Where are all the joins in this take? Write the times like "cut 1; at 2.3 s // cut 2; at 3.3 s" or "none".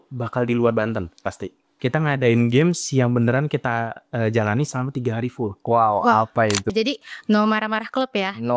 cut 1; at 1.6 s // cut 2; at 6.7 s